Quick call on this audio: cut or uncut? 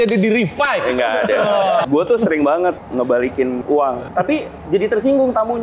cut